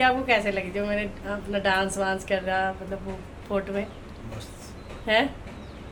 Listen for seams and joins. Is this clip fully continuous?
yes; 0 cuts

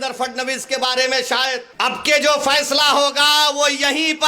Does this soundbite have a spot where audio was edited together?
yes; 1 cut; at 1.7 s

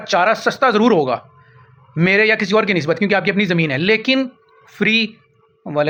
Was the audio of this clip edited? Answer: no; 0 cuts

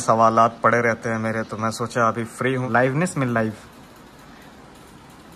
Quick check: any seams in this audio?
no; 0 cuts

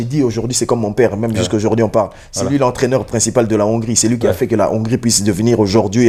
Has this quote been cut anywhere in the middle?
no; 0 cuts

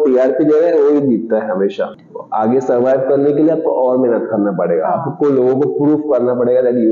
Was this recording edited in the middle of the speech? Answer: yes; 1 cut; at 2.0 s

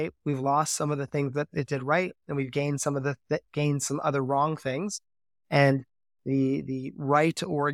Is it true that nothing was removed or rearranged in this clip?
yes; 0 cuts

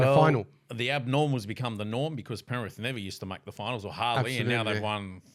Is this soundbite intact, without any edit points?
yes; 0 cuts

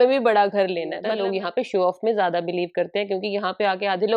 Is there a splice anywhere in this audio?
yes; 1 cut; at 1.1 s

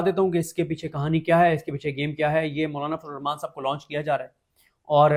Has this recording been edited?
no; 0 cuts

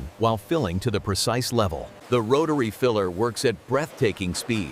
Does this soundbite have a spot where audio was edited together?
yes; 1 cut; at 1.9 s

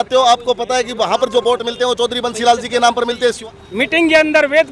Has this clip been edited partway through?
yes; 1 cut; at 3.2 s

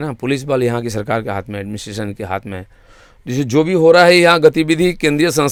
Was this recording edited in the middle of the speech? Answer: no; 0 cuts

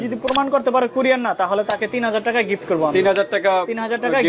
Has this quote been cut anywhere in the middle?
no; 0 cuts

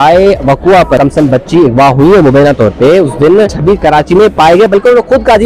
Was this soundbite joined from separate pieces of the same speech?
yes; 2 cuts; at 1.0 s, 3.5 s

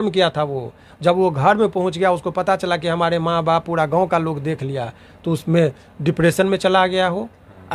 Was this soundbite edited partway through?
no; 0 cuts

